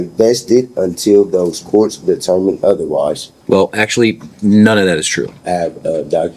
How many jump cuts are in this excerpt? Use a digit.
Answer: 2